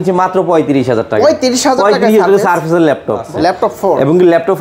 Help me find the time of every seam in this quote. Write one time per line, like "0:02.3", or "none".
0:03.3

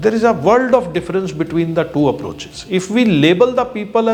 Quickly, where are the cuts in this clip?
none

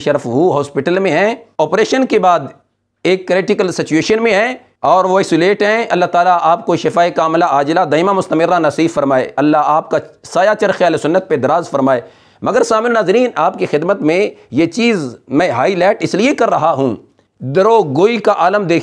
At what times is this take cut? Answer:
none

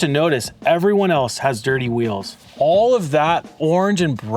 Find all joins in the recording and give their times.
0:02.5

